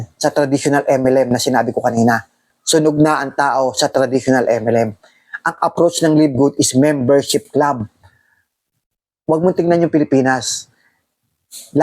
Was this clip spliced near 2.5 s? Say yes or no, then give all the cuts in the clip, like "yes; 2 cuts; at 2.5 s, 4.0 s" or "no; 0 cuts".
yes; 1 cut; at 2.5 s